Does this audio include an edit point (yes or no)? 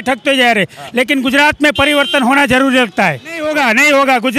yes